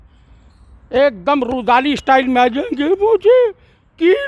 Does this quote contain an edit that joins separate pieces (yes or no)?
no